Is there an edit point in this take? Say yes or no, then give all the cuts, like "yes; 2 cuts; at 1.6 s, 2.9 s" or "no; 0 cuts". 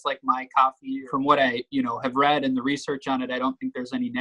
yes; 1 cut; at 1.0 s